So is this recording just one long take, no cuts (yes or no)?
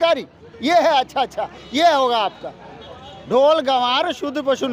yes